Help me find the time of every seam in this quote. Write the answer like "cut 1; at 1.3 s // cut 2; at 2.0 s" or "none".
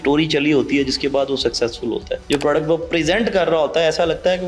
cut 1; at 2.1 s